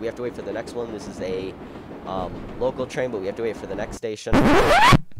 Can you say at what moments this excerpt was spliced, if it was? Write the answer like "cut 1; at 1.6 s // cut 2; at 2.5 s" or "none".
cut 1; at 4.2 s